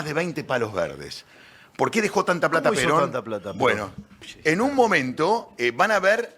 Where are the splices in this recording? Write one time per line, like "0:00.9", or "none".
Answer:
0:04.0